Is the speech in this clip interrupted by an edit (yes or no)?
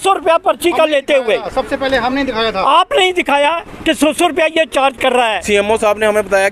yes